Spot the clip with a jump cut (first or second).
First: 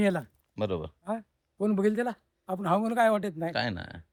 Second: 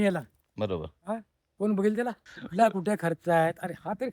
second